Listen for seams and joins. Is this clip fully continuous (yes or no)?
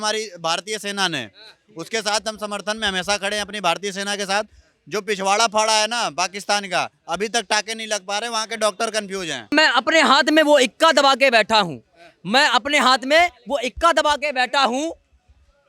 no